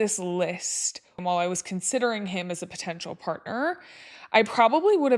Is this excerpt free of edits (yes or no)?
no